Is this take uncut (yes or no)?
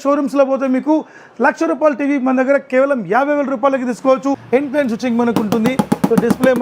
no